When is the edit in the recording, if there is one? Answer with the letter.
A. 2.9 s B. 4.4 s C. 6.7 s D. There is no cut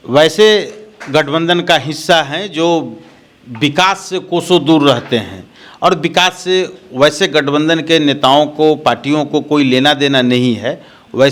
D